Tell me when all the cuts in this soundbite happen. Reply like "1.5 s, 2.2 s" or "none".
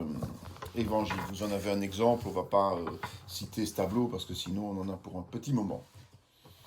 1.6 s